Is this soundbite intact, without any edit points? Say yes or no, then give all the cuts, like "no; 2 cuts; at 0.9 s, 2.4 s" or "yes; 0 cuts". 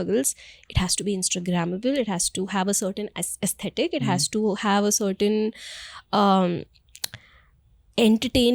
yes; 0 cuts